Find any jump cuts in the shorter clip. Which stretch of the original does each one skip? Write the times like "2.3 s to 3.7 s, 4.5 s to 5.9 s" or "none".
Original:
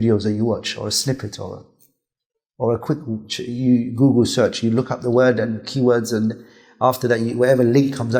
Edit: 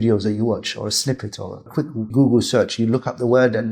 2.1 s to 3.9 s